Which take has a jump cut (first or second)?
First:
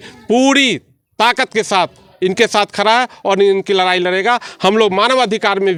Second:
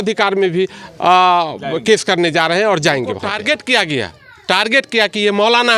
second